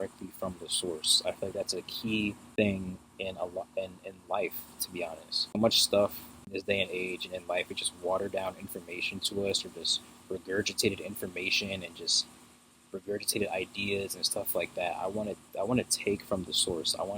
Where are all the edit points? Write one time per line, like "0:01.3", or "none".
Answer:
0:02.4
0:05.5
0:06.5